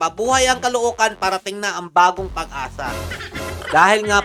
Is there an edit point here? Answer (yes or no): no